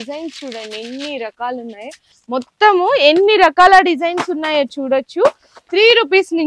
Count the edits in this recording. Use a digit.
1